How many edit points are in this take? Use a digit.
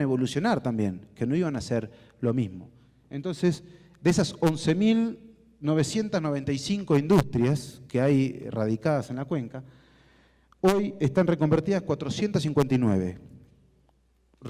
1